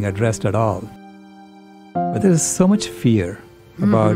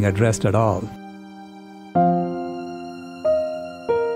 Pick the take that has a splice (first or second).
first